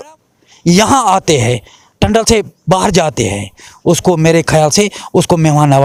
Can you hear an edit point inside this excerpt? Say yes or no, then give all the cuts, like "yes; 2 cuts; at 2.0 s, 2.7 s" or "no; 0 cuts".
no; 0 cuts